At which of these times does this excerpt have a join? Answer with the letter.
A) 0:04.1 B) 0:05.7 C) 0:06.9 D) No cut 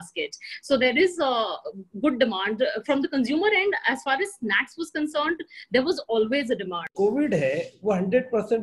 C